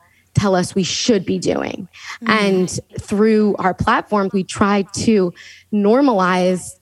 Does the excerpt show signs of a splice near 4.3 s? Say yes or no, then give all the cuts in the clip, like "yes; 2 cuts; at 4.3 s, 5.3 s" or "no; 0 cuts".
yes; 1 cut; at 4.3 s